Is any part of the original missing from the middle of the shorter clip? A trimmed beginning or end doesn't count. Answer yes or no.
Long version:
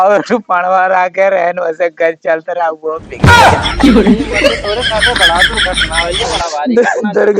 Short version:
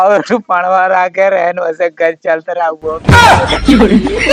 yes